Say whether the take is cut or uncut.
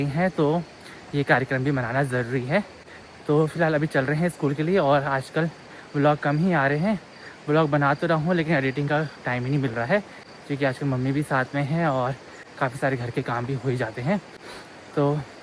uncut